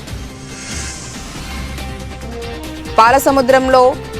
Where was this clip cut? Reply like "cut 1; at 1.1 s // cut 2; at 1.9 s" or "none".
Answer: cut 1; at 1.3 s